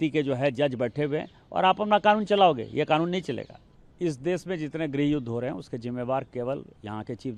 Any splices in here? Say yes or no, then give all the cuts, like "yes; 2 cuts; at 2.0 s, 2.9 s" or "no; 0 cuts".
no; 0 cuts